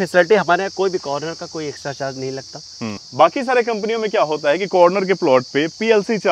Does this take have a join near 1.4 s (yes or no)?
no